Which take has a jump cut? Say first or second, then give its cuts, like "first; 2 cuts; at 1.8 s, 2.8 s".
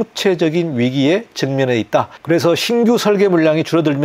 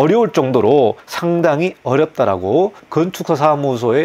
second; 2 cuts; at 1.1 s, 2.8 s